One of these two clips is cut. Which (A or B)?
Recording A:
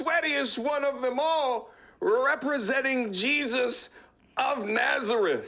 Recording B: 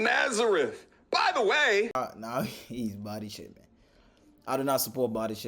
B